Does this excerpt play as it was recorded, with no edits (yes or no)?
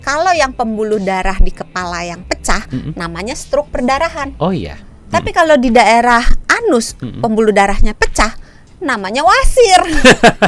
yes